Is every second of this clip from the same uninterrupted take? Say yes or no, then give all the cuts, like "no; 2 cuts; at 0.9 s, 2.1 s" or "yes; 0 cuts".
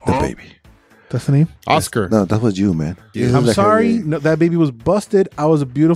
no; 1 cut; at 3.1 s